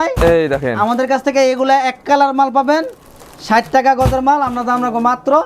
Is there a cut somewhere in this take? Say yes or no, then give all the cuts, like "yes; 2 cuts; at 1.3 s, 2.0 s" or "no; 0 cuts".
no; 0 cuts